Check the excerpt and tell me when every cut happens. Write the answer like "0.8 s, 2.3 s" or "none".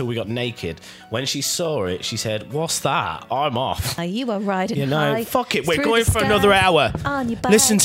4.0 s